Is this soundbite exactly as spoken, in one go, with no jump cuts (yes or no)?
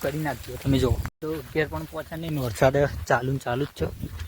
no